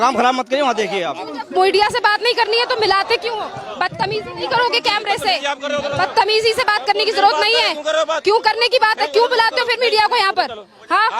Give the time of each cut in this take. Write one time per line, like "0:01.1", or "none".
none